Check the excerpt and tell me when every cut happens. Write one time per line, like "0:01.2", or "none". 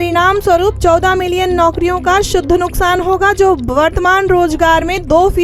none